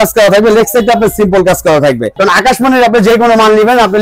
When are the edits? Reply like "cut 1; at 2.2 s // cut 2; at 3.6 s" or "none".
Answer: cut 1; at 2.1 s